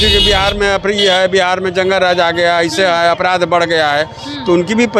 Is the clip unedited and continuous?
yes; 0 cuts

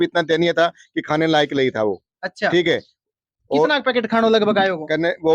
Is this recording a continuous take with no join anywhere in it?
yes; 0 cuts

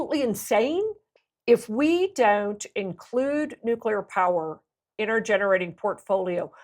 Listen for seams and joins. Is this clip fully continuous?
no; 1 cut; at 1.1 s

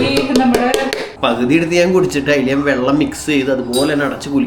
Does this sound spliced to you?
yes; 1 cut; at 1.0 s

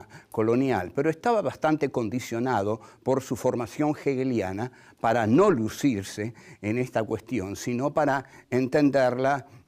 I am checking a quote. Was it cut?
no; 0 cuts

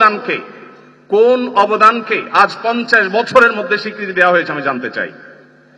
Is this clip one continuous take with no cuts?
yes; 0 cuts

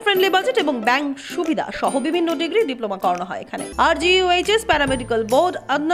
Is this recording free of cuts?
no; 1 cut; at 3.6 s

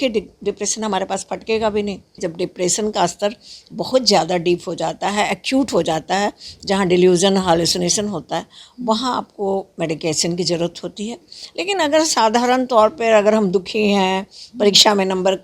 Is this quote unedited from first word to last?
no; 1 cut; at 2.2 s

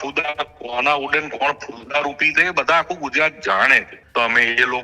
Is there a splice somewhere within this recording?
yes; 1 cut; at 3.9 s

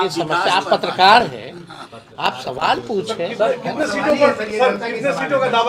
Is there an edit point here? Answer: no; 0 cuts

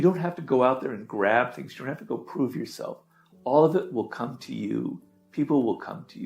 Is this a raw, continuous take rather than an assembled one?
yes; 0 cuts

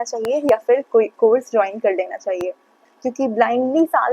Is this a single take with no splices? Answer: no; 1 cut; at 2.7 s

